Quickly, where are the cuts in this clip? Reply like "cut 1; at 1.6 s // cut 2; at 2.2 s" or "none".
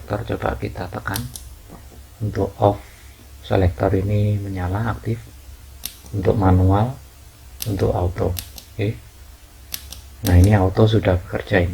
none